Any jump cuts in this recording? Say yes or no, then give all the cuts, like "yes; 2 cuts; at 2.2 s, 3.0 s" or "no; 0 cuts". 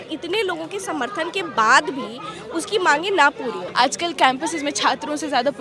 yes; 1 cut; at 3.7 s